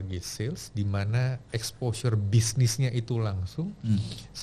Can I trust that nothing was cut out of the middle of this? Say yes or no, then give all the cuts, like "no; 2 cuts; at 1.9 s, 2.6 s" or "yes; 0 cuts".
yes; 0 cuts